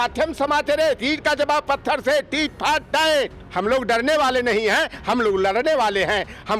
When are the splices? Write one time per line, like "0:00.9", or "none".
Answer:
0:03.4